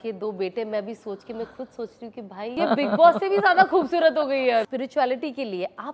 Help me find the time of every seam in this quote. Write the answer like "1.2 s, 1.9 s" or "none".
2.6 s, 4.7 s